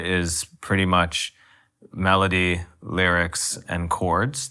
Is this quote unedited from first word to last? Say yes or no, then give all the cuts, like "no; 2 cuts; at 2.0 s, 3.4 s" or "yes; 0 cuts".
yes; 0 cuts